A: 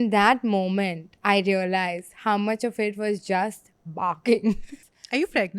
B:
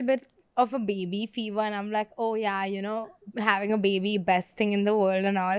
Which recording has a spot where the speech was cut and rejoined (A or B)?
A